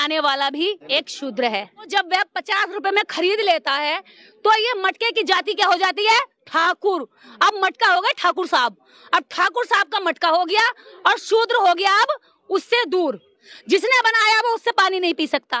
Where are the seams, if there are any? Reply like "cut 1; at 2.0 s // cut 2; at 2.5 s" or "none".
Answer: cut 1; at 0.8 s // cut 2; at 1.9 s

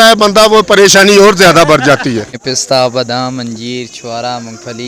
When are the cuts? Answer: cut 1; at 2.3 s

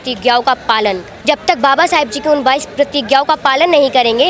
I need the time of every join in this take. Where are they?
cut 1; at 1.1 s

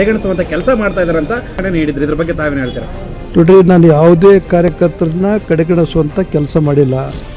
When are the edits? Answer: cut 1; at 1.6 s

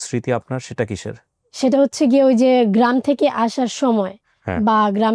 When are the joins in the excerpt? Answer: none

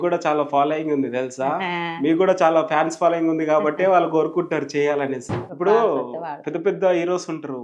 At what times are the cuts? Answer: cut 1; at 5.3 s

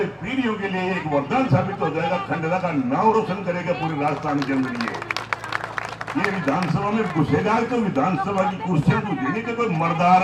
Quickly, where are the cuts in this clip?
none

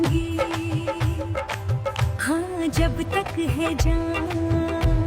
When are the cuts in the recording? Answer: cut 1; at 2.1 s

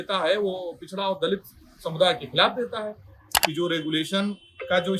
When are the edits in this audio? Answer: cut 1; at 3.3 s

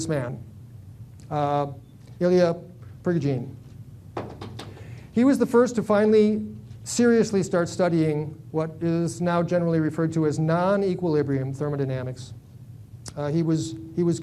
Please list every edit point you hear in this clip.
cut 1; at 11.7 s

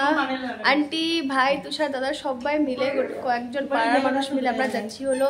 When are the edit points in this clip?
none

